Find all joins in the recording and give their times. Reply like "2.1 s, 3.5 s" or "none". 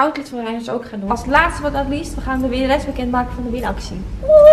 1.0 s